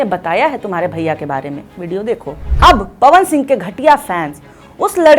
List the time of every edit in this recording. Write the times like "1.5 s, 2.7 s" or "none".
2.4 s

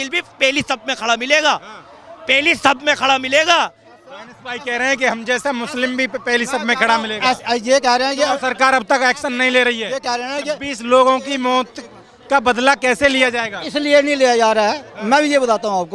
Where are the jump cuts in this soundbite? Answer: none

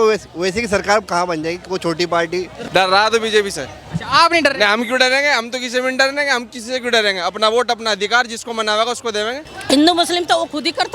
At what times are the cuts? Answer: 2.6 s, 9.5 s

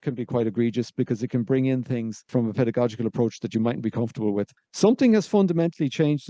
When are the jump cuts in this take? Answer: 2.3 s, 4.5 s

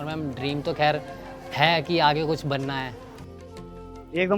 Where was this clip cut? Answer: 3.5 s

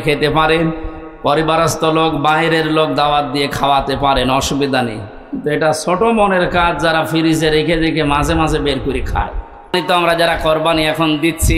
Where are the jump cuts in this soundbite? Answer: 9.7 s

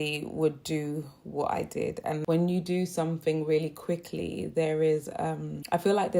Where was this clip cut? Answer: none

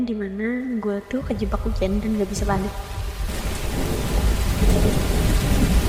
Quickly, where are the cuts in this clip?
none

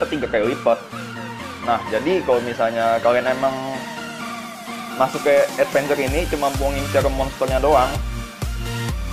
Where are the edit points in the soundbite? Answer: none

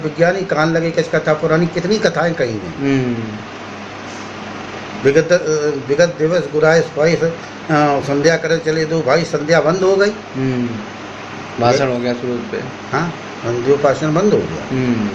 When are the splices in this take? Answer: none

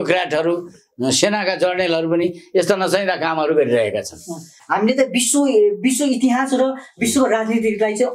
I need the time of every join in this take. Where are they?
4.6 s

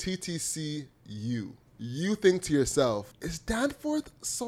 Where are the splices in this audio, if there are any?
1.6 s, 3.1 s

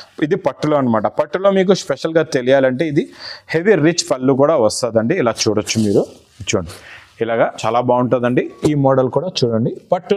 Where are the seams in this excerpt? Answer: 7.6 s

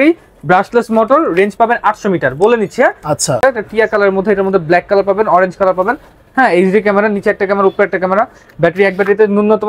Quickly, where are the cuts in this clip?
3.4 s

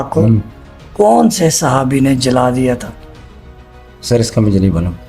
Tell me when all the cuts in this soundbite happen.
none

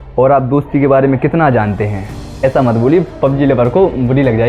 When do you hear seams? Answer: 2.4 s

